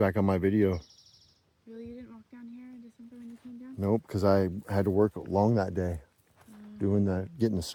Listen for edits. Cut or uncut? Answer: uncut